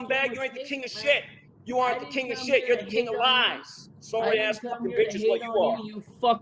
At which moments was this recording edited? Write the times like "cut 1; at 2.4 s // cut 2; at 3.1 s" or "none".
none